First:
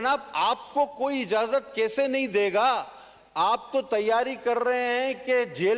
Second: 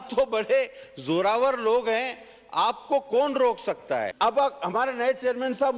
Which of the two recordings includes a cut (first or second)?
second